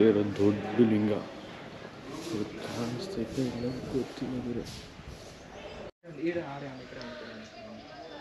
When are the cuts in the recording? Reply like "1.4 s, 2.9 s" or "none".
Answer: 6.0 s